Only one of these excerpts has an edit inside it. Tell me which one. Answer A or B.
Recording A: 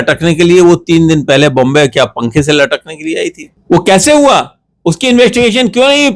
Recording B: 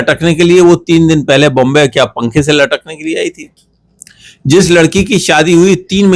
A